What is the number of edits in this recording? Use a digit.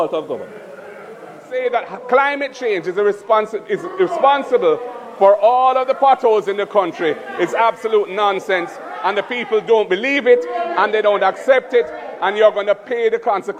1